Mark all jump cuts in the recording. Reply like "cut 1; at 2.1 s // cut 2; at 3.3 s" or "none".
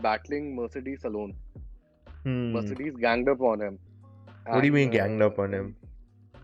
cut 1; at 3.8 s